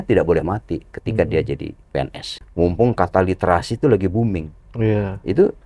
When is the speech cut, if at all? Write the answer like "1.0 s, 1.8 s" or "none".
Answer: 2.4 s